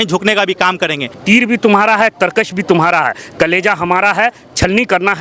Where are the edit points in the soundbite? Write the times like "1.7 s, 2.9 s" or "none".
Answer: 1.2 s